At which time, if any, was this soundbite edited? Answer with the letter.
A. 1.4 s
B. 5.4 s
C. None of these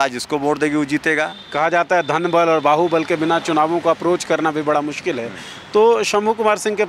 A